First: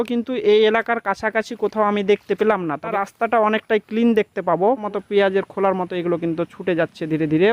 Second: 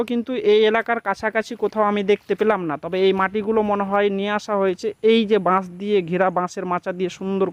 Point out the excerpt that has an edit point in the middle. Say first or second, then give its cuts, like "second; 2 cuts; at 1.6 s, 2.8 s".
first; 2 cuts; at 2.9 s, 4.8 s